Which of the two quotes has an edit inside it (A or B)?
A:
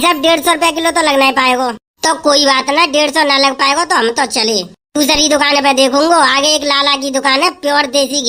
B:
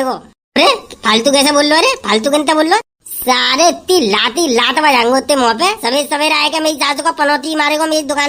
B